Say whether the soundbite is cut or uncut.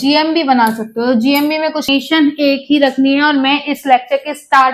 cut